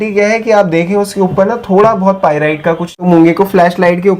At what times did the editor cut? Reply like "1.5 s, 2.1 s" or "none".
3.0 s